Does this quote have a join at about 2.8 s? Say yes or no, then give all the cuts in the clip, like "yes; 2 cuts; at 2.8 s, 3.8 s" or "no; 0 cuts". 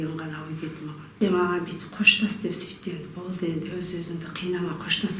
no; 1 cut; at 1.1 s